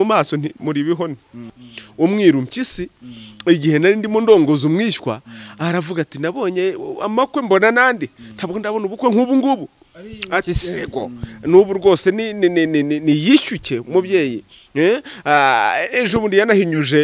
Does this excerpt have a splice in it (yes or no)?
yes